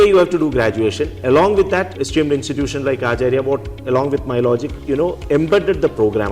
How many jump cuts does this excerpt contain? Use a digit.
2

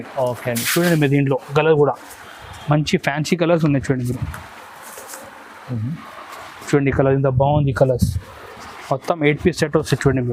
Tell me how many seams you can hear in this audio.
0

